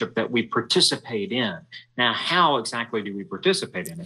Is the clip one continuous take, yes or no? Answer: yes